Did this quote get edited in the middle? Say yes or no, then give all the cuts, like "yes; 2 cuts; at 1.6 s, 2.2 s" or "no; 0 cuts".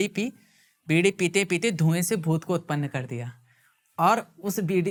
no; 0 cuts